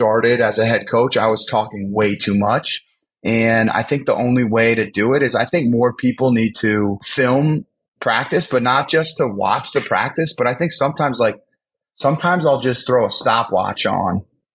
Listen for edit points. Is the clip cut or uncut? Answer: cut